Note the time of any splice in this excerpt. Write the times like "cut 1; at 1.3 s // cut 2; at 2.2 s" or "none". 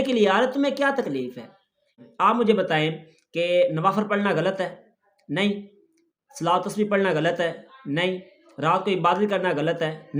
cut 1; at 2.0 s